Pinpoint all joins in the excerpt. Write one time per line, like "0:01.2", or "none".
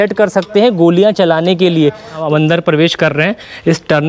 0:02.1